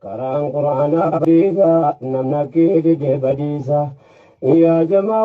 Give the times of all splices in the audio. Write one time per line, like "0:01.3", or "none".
0:01.2